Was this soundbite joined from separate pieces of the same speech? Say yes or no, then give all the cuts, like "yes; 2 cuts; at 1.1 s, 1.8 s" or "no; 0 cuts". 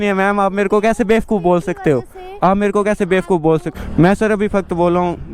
yes; 1 cut; at 3.7 s